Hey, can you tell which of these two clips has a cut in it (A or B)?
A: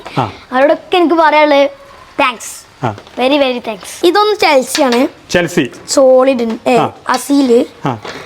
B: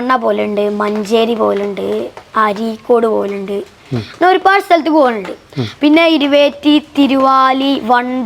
A